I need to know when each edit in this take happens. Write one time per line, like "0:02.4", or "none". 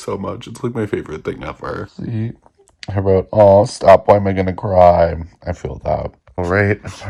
none

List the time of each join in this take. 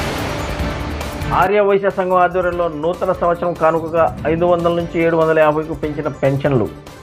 none

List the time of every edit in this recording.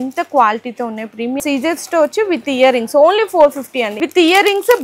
0:01.4
0:03.9

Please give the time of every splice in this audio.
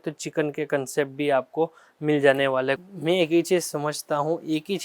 0:02.8

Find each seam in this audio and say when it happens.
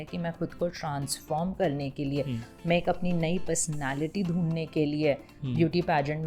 none

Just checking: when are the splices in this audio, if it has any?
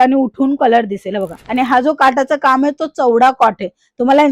0:01.4

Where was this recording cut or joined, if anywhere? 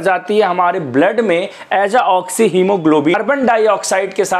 0:03.1

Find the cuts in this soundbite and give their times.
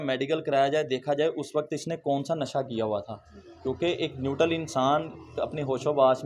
none

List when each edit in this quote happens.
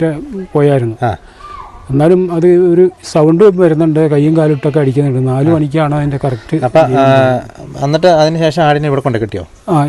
none

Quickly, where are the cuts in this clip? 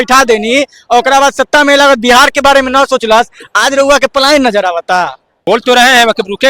0:05.3

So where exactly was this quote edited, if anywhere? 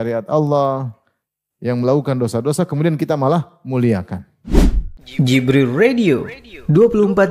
0:04.4

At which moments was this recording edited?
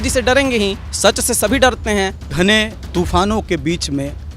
0:00.9
0:02.3

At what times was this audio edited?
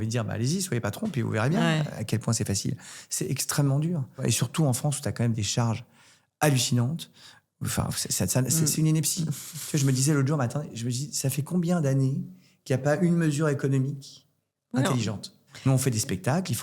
0:04.2
0:15.4

